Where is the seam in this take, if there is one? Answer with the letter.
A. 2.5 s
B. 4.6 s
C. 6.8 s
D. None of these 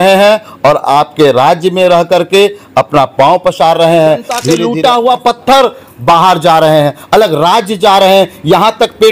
B